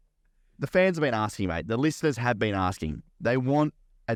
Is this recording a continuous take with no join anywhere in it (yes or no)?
yes